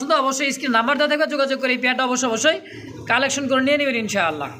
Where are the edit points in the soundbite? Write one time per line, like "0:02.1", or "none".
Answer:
none